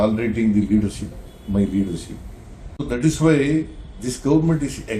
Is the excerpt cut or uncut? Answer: cut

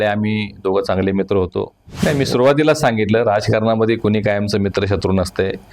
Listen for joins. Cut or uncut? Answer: cut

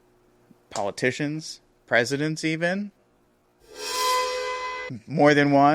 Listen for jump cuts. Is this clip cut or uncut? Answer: uncut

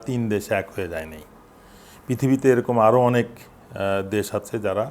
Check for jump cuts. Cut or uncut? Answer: uncut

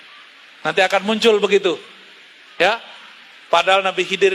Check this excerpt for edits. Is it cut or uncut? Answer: uncut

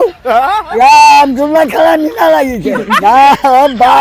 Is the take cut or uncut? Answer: cut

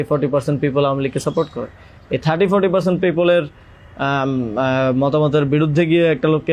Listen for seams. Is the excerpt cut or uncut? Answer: uncut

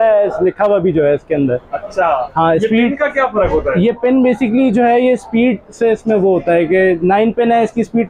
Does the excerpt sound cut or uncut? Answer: uncut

